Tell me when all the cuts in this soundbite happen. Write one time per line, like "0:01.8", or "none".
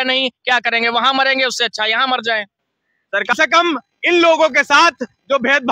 0:03.3